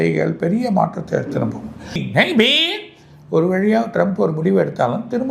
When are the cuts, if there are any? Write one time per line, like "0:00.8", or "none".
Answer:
0:02.0